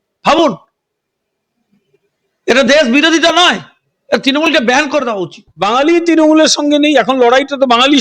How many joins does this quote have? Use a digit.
1